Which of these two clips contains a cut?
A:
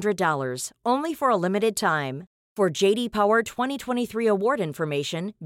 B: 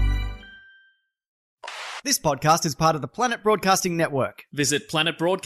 B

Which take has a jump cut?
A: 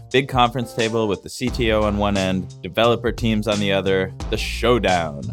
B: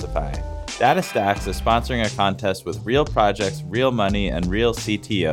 A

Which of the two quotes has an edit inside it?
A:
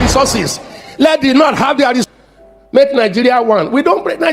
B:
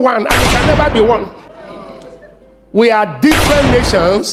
A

